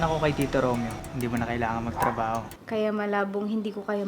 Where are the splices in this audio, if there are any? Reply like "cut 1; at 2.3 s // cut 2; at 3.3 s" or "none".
cut 1; at 1.0 s // cut 2; at 2.5 s